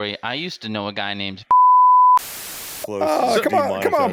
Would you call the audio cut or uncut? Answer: uncut